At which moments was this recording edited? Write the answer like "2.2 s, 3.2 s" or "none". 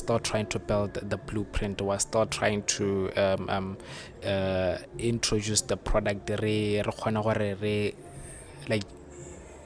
none